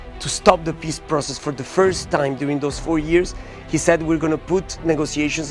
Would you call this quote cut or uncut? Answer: uncut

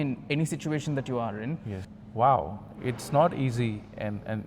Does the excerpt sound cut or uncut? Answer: cut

